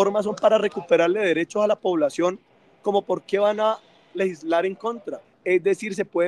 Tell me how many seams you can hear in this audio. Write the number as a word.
one